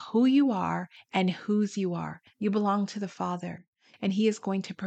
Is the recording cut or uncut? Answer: uncut